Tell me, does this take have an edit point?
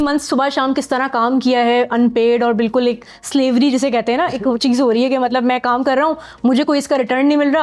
no; 0 cuts

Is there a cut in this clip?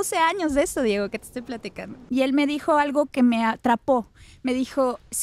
yes; 1 cut; at 2.0 s

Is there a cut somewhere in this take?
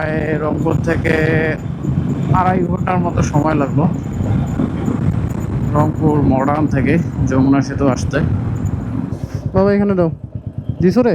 yes; 1 cut; at 9.1 s

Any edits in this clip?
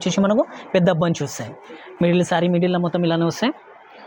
no; 0 cuts

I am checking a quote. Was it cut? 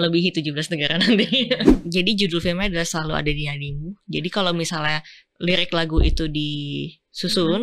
yes; 1 cut; at 1.8 s

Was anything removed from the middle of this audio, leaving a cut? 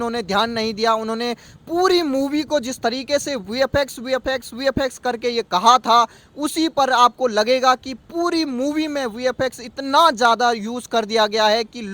no; 0 cuts

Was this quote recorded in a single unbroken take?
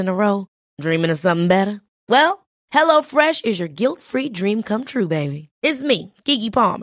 yes; 0 cuts

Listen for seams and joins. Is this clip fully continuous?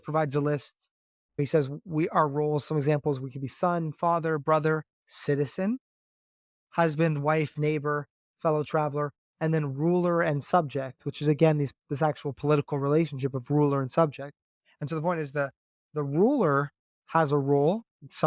no; 1 cut; at 1.4 s

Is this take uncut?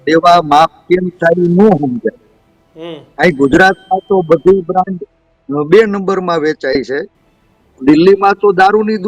yes; 0 cuts

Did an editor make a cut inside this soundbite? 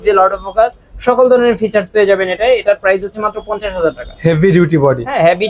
no; 0 cuts

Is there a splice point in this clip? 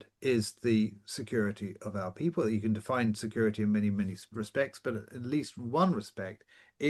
no; 0 cuts

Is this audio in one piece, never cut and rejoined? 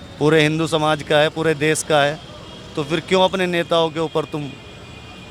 yes; 0 cuts

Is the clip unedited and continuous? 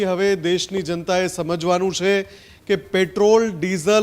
yes; 0 cuts

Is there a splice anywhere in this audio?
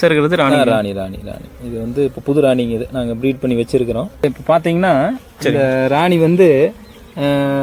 yes; 1 cut; at 4.2 s

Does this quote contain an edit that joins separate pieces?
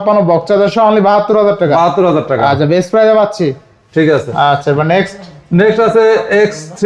no; 0 cuts

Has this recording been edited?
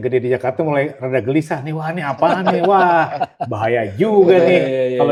no; 0 cuts

